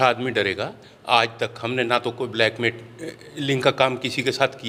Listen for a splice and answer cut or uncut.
uncut